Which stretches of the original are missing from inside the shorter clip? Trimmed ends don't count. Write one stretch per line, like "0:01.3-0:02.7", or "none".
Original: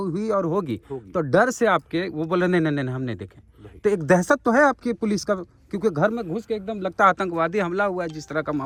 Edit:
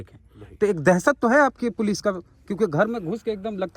none

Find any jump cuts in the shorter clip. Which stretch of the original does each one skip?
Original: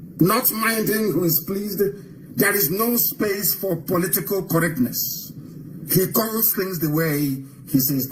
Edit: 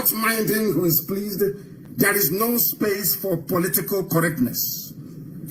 none

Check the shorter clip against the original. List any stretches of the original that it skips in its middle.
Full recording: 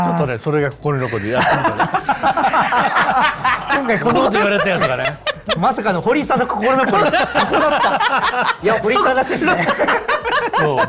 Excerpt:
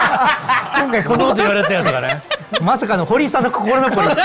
none

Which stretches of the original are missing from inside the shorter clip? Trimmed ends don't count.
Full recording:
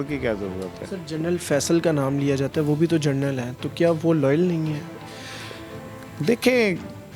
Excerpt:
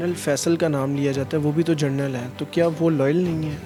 none

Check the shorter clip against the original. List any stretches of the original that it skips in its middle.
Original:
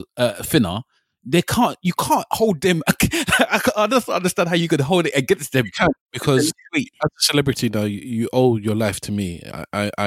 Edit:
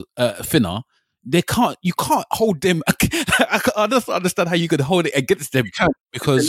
none

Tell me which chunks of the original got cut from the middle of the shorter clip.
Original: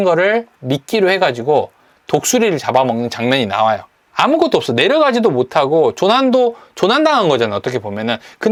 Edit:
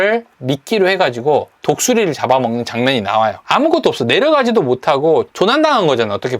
0:01.7-0:02.0
0:03.8-0:04.1
0:06.0-0:06.7

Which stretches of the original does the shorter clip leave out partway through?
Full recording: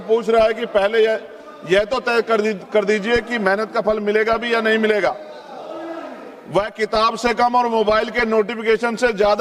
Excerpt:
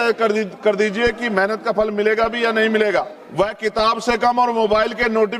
0:05.3-0:06.4

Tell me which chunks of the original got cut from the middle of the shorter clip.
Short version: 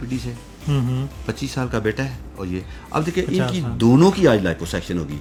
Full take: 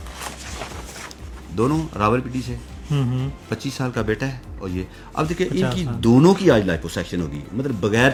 none

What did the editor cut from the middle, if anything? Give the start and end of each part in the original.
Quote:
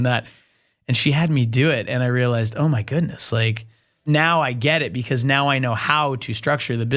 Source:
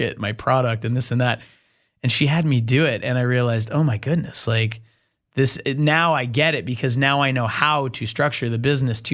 0:05.2-0:05.8

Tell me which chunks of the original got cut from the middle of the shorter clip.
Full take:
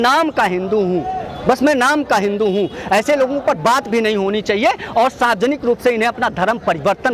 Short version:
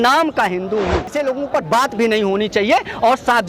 0:01.1-0:03.0

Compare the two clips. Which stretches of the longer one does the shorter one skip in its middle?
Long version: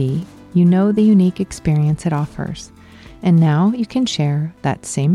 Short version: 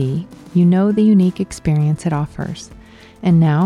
none

